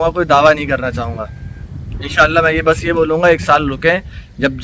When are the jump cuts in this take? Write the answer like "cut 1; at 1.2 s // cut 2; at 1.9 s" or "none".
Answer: none